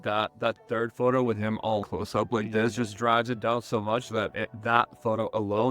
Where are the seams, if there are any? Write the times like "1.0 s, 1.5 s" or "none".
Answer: 1.8 s